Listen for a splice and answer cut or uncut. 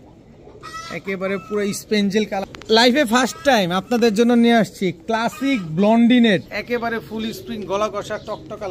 cut